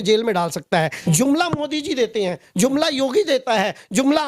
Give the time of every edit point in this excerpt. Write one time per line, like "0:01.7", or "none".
0:01.0